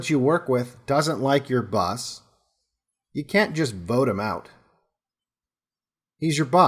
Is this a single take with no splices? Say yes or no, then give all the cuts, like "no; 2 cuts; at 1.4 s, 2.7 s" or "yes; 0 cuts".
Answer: yes; 0 cuts